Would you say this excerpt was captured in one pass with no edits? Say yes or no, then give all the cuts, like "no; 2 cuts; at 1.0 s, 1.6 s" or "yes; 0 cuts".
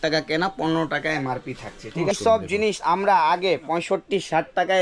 no; 1 cut; at 2.2 s